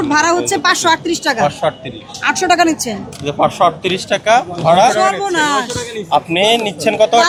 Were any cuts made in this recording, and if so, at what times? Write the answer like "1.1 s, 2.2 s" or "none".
none